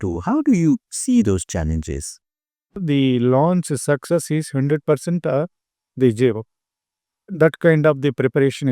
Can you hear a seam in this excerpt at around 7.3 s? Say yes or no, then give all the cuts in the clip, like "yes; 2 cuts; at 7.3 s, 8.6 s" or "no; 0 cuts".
yes; 2 cuts; at 2.8 s, 7.3 s